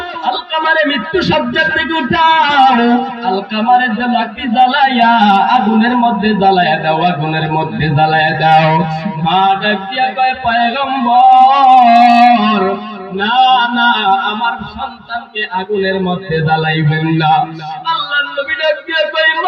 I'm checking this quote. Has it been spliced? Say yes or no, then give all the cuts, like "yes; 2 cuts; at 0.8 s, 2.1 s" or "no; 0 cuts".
no; 0 cuts